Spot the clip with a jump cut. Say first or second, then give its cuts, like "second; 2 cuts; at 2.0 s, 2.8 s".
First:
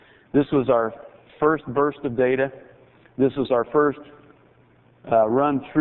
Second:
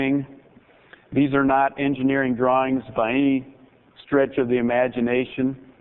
second; 1 cut; at 4.0 s